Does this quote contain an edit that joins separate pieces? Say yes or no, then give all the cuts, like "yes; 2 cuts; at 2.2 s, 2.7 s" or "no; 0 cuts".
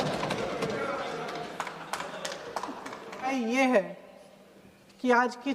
yes; 1 cut; at 3.3 s